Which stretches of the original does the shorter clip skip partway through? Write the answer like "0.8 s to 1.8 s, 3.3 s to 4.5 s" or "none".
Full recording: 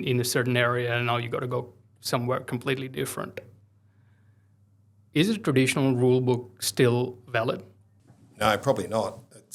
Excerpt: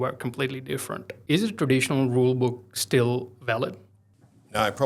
3.4 s to 5.0 s